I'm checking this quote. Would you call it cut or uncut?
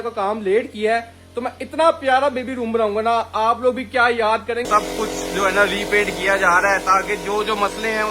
cut